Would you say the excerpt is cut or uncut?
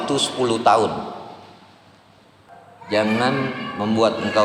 cut